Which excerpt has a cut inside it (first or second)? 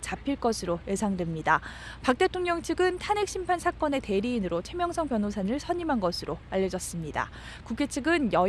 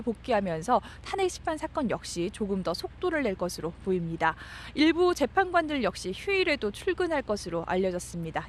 first